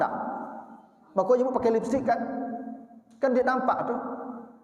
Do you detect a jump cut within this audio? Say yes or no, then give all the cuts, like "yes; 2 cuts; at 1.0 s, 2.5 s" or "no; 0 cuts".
no; 0 cuts